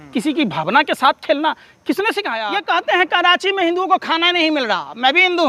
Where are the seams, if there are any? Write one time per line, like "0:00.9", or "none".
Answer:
0:02.3